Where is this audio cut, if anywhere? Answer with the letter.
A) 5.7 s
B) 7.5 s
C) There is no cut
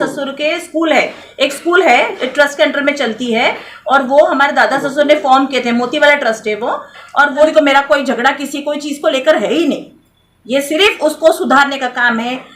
B